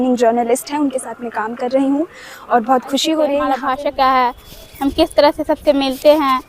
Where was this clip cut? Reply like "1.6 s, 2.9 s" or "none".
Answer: 3.6 s